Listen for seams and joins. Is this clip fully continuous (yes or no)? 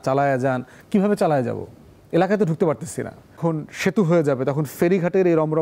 no